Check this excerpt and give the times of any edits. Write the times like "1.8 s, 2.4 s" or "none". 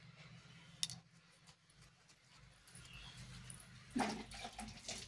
none